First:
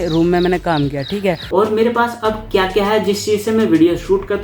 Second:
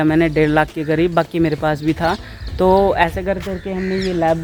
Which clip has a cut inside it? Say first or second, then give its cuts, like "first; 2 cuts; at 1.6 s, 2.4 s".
first; 1 cut; at 1.4 s